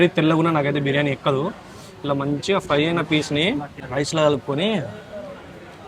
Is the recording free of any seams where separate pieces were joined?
no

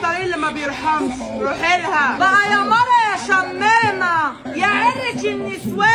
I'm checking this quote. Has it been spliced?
no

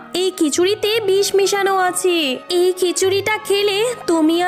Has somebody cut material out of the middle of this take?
no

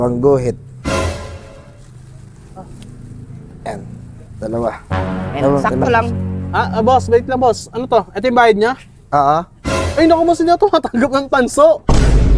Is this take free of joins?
yes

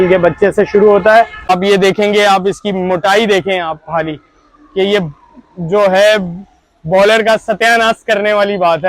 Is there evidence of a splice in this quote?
yes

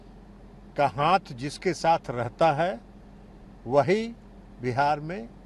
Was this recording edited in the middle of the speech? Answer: no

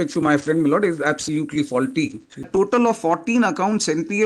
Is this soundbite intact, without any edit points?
no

